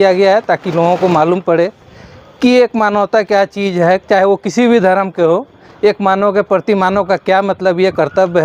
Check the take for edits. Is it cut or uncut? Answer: uncut